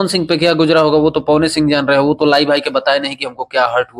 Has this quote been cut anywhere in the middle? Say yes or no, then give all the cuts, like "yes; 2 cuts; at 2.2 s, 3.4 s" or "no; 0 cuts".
no; 0 cuts